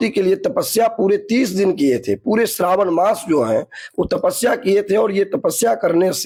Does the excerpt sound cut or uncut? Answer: uncut